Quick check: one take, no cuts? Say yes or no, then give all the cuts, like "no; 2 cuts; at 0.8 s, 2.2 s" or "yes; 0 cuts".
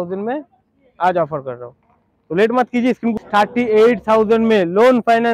no; 1 cut; at 3.4 s